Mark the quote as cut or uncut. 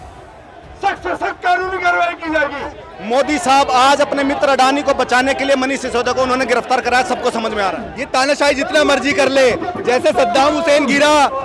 cut